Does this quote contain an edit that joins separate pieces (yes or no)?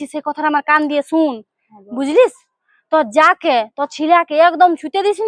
no